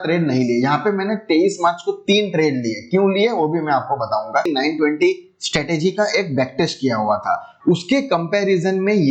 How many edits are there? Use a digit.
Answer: 1